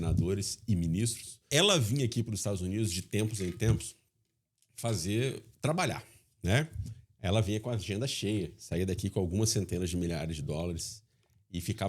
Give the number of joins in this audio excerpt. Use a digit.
1